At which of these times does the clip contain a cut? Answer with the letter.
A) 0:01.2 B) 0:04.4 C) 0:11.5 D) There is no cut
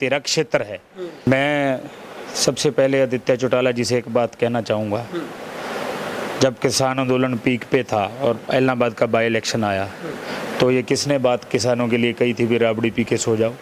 A